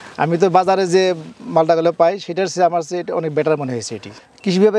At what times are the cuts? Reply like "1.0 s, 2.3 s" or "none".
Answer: none